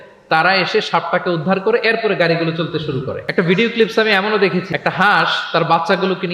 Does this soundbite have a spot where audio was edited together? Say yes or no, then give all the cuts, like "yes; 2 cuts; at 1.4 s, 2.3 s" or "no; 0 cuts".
yes; 1 cut; at 3.2 s